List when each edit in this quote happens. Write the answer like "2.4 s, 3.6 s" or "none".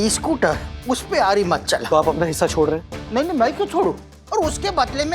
1.8 s, 4.1 s